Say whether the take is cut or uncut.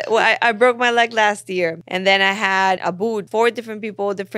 cut